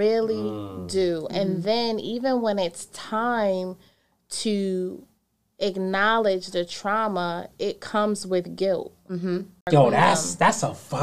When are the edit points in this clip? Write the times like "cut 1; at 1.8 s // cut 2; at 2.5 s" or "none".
cut 1; at 9.6 s